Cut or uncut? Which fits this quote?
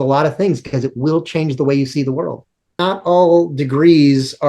cut